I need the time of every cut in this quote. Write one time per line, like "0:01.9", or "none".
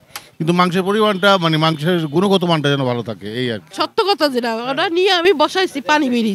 0:03.7